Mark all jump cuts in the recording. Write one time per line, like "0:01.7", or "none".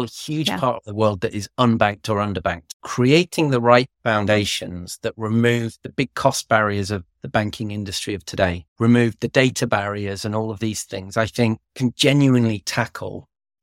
0:11.6